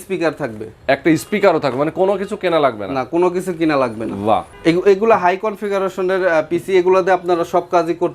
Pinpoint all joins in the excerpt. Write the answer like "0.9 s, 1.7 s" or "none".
4.5 s